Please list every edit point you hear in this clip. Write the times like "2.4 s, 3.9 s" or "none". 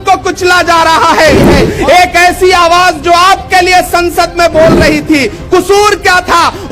1.6 s